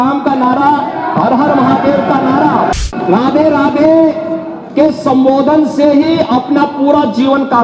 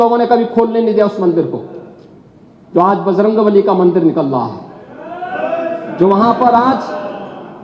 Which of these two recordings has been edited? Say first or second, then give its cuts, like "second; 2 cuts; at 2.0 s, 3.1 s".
first; 1 cut; at 2.7 s